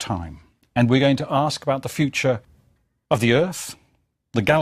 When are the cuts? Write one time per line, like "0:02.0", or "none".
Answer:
0:03.3

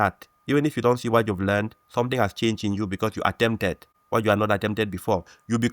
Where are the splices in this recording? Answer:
0:03.9

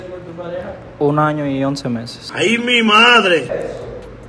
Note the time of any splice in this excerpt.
none

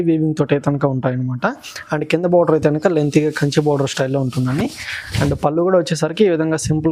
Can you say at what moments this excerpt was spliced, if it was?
none

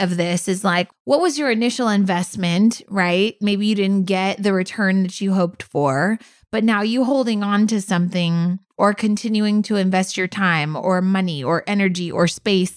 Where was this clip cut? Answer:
0:00.9

